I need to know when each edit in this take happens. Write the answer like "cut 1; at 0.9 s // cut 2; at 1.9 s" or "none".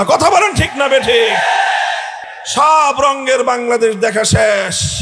cut 1; at 2.1 s